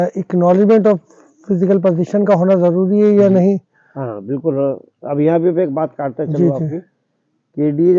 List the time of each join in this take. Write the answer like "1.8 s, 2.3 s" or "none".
none